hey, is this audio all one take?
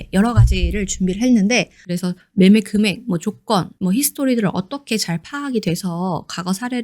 no; 1 cut; at 1.8 s

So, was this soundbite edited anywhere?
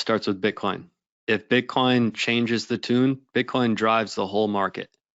no; 0 cuts

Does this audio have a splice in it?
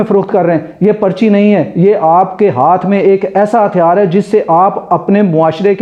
no; 0 cuts

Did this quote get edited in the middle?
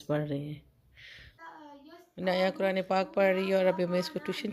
yes; 1 cut; at 1.4 s

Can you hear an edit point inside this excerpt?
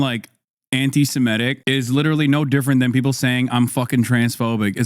yes; 1 cut; at 1.6 s

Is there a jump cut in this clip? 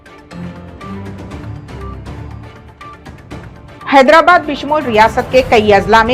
yes; 1 cut; at 3.8 s

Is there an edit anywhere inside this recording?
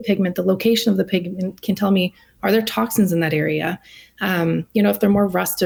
no; 0 cuts

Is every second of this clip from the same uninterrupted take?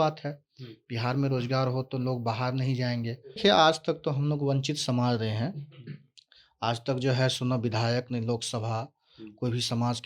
no; 1 cut; at 3.4 s

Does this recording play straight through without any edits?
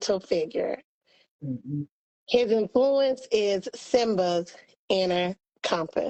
yes; 0 cuts

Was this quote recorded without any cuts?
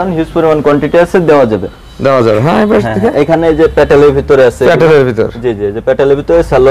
yes; 0 cuts

